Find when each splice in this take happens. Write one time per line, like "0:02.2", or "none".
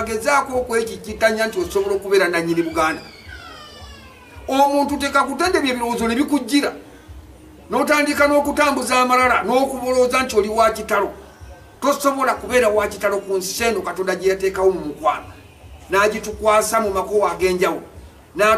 none